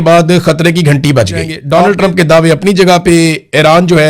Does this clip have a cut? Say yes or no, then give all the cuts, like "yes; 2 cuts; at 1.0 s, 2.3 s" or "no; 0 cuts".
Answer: yes; 1 cut; at 1.5 s